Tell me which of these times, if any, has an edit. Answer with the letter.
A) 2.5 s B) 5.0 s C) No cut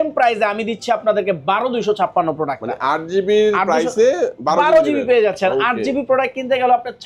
C